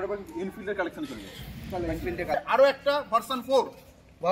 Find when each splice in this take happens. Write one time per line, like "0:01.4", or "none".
0:02.4

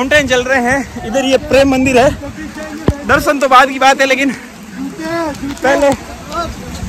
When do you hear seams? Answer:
none

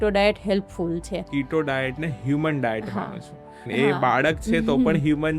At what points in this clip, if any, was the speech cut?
0:01.3
0:03.6

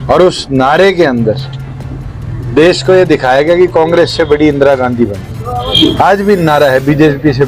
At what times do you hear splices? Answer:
0:05.7

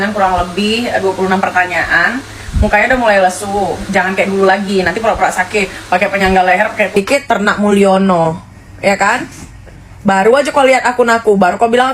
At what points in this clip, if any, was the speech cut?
0:06.9

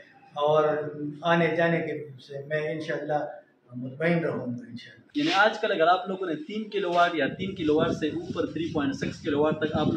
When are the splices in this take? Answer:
0:05.0

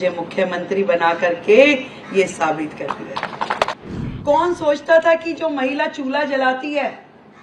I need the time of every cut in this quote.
0:03.7

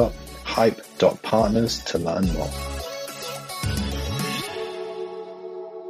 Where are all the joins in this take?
0:02.5

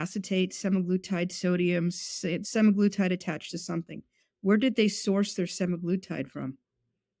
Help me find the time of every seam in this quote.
0:02.3

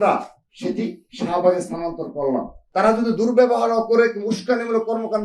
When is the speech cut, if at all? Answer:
0:02.6

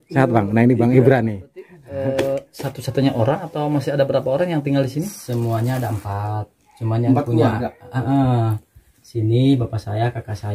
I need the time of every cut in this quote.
0:01.8

